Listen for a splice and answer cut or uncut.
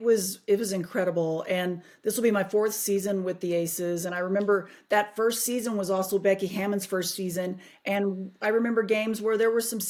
uncut